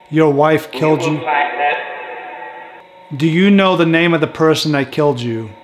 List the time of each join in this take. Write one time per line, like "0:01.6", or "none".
0:02.9

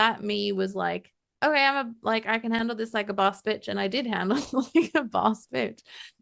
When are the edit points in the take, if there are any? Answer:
none

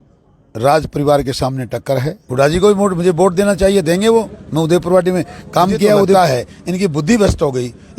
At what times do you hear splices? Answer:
0:02.2
0:06.1

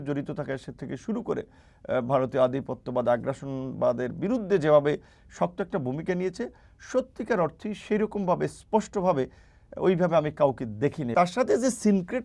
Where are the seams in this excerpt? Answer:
0:11.1

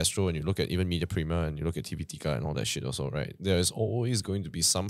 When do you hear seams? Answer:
none

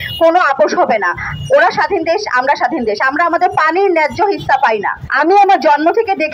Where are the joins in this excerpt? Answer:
0:05.0

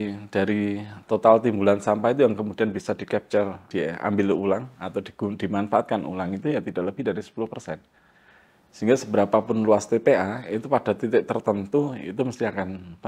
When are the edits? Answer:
0:03.7

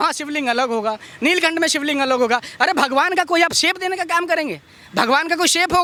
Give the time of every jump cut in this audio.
none

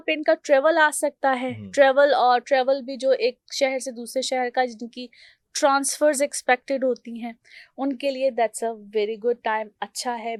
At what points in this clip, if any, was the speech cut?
none

